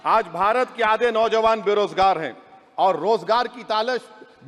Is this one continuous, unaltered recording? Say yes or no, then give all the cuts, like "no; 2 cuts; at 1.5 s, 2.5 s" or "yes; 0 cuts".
yes; 0 cuts